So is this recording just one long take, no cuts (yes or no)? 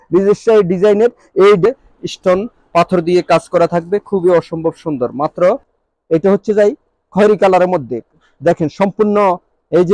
no